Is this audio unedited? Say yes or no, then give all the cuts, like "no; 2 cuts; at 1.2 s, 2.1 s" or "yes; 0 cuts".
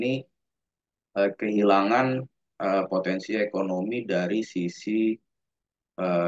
yes; 0 cuts